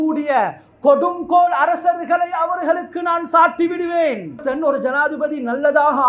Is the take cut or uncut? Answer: cut